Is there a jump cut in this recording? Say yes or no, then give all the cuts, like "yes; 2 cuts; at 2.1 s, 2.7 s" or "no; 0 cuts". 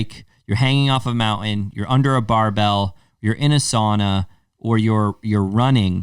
no; 0 cuts